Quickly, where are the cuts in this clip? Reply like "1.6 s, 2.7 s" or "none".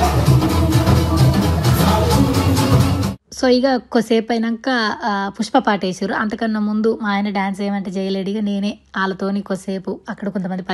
none